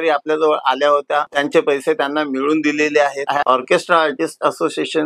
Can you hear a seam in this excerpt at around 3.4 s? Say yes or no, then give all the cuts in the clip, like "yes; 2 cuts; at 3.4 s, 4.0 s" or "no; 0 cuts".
yes; 1 cut; at 3.4 s